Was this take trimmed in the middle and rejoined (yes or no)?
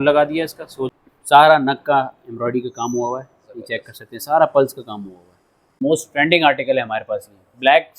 yes